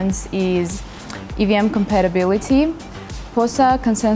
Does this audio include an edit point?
no; 0 cuts

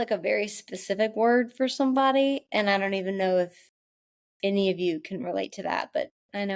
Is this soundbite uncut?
yes; 0 cuts

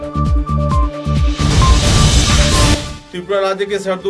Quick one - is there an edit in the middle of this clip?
no; 0 cuts

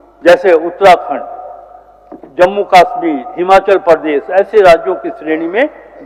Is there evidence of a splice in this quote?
no; 0 cuts

